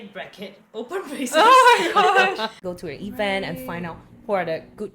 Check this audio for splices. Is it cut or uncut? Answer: cut